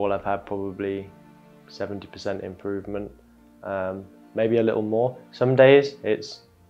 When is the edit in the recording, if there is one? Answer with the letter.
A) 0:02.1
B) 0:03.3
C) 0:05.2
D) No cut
D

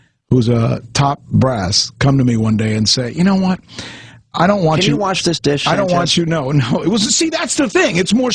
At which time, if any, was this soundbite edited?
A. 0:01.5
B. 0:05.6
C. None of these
B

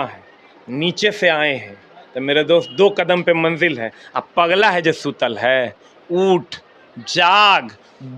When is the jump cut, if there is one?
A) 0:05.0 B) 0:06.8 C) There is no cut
C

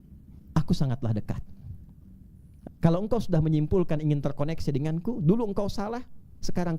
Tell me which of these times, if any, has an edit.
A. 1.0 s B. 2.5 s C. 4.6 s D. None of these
B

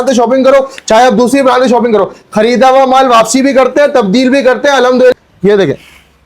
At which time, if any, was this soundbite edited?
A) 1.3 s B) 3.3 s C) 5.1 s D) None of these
C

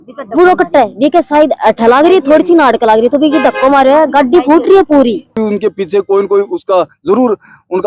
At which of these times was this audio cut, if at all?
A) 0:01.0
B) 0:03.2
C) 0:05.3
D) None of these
C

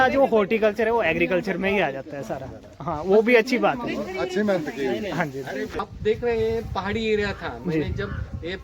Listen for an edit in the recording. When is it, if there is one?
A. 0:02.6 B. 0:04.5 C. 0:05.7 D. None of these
C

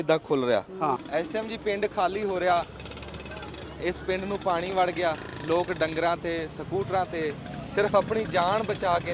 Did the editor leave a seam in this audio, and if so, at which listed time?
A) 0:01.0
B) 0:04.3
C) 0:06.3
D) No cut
A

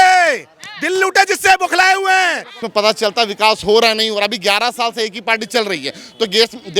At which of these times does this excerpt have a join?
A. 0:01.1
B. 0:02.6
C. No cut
B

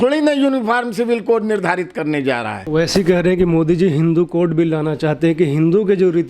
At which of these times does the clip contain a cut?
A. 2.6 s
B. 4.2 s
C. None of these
A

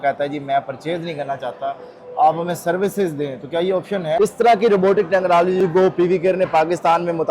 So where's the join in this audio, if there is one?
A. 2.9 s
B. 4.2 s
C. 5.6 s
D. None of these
B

